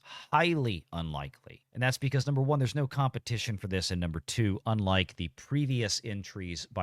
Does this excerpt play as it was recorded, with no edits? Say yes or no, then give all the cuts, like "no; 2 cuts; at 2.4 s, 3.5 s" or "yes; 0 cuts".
yes; 0 cuts